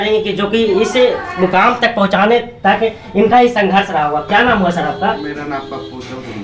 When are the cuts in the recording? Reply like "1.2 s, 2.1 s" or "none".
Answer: none